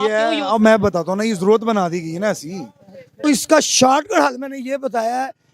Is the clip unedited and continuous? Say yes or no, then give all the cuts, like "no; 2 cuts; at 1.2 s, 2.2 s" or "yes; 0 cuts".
no; 1 cut; at 3.2 s